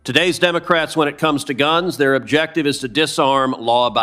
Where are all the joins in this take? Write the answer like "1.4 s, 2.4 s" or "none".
none